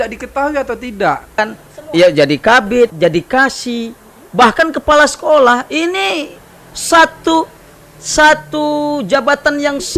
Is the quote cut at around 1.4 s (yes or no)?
yes